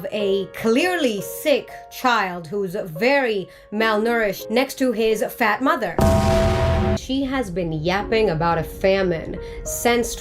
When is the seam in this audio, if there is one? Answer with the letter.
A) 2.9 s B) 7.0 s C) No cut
B